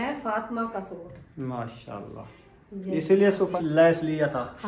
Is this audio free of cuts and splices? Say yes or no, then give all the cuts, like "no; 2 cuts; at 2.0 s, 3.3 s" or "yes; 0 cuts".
no; 1 cut; at 3.5 s